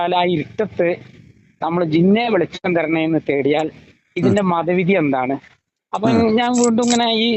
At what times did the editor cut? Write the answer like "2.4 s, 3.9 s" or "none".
none